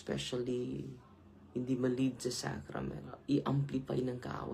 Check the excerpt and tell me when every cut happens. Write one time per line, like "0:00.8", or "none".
0:03.1